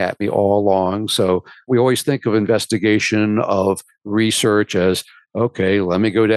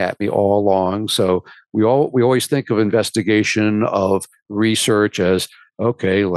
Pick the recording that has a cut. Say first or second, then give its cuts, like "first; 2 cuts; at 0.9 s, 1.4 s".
first; 1 cut; at 1.7 s